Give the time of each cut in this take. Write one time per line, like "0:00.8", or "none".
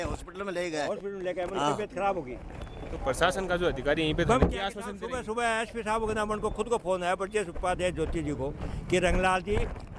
none